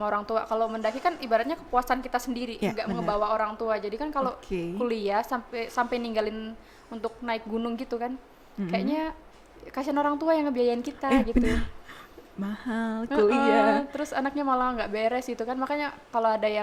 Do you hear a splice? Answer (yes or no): no